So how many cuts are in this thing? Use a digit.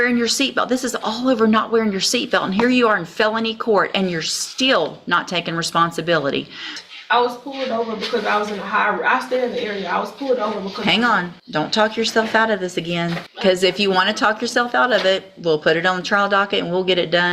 3